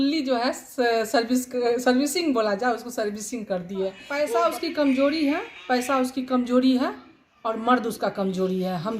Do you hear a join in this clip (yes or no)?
yes